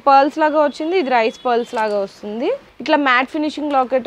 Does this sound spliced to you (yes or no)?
yes